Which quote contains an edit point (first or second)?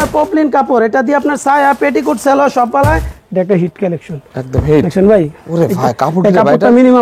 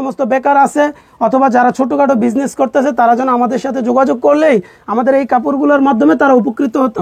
first